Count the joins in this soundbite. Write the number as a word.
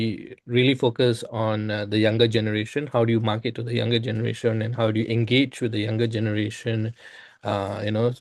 zero